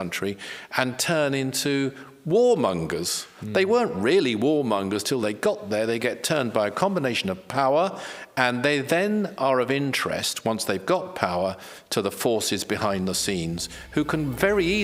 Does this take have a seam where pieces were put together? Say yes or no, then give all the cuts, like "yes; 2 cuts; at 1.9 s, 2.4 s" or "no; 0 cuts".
no; 0 cuts